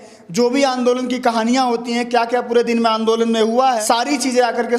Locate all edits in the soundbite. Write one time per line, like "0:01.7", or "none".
0:03.8